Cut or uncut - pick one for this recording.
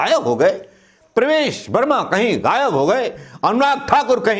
uncut